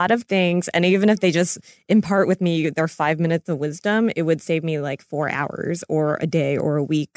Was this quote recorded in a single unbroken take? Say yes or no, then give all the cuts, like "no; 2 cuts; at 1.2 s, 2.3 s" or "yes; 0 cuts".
yes; 0 cuts